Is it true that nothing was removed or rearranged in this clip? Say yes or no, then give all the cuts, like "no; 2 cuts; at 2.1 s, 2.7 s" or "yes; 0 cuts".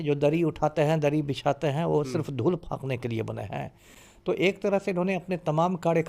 yes; 0 cuts